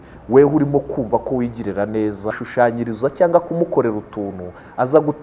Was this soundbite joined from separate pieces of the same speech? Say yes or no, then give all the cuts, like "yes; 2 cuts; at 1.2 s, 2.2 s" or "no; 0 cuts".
yes; 1 cut; at 2.4 s